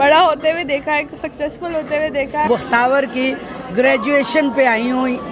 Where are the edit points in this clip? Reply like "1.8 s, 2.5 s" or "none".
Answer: 2.5 s